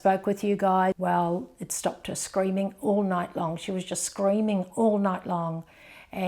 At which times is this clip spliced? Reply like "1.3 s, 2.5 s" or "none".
1.0 s